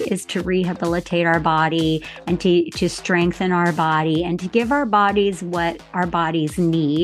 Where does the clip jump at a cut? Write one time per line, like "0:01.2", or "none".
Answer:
none